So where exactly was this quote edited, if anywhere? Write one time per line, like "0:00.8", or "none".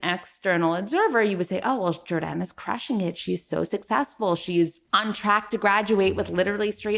none